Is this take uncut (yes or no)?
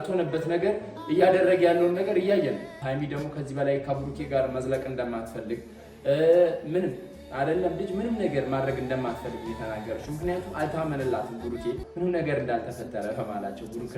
no